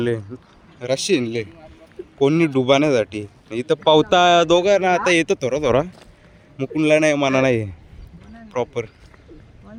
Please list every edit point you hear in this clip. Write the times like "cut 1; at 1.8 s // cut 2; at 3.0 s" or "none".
none